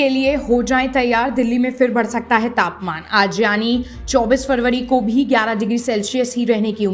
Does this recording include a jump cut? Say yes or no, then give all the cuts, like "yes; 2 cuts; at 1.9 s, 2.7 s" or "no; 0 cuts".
no; 0 cuts